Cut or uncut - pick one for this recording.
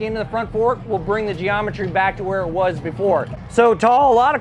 cut